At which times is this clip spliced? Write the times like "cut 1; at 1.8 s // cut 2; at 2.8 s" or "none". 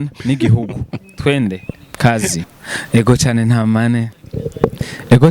cut 1; at 2.4 s